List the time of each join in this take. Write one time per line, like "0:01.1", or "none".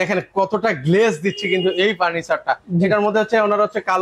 none